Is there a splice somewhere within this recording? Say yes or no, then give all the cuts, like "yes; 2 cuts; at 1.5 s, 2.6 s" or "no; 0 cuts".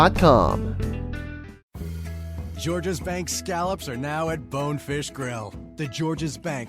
yes; 1 cut; at 1.7 s